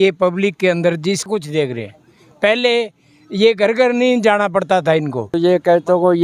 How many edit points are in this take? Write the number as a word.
two